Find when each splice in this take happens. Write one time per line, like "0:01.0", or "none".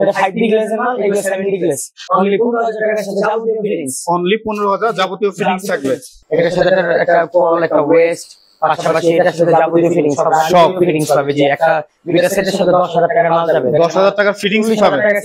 0:01.9
0:06.1